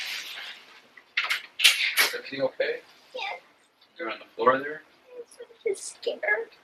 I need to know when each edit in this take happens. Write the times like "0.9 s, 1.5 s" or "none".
none